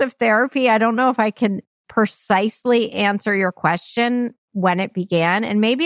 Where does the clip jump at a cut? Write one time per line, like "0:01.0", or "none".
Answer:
none